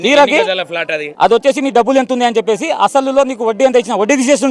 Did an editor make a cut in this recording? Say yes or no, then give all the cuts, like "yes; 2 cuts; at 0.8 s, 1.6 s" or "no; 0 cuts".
yes; 1 cut; at 1.0 s